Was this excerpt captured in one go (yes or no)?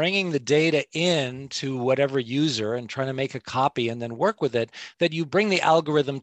no